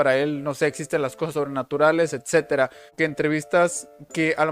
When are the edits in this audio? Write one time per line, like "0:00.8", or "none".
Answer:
0:02.8